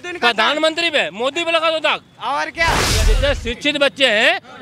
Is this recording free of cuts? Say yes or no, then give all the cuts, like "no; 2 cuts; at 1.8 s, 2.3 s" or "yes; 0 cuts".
no; 1 cut; at 2.9 s